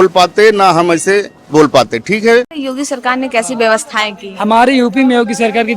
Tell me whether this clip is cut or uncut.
cut